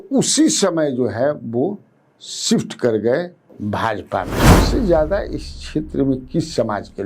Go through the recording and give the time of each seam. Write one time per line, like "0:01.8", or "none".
0:04.6